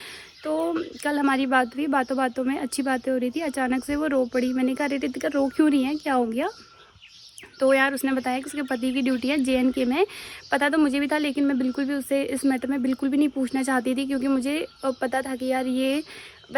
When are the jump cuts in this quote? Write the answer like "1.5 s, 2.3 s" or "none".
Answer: none